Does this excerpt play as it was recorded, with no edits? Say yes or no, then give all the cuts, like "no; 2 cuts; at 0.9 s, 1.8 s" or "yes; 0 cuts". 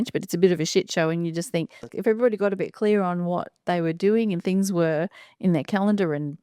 no; 1 cut; at 1.9 s